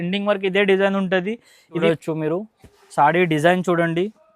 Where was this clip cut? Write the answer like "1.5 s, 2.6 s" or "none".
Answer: 1.7 s